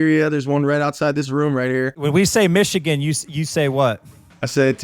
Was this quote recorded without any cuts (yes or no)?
no